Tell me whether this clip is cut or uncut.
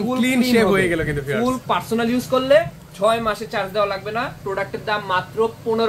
cut